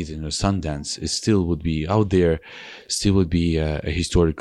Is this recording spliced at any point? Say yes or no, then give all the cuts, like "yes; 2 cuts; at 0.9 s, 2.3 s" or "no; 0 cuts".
no; 0 cuts